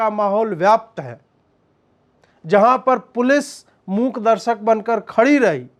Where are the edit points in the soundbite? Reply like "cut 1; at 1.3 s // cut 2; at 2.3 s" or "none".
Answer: none